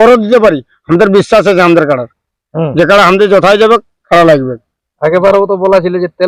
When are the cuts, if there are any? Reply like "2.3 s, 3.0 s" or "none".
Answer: none